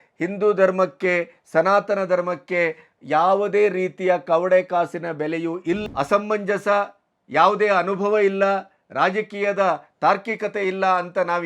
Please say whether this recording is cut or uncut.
cut